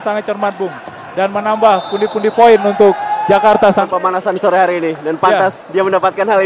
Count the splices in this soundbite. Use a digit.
1